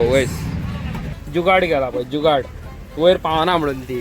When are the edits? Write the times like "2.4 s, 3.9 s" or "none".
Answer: 1.2 s